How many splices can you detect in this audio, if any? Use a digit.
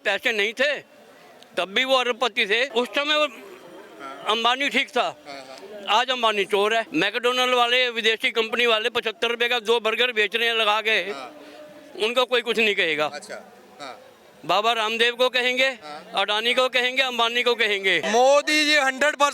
3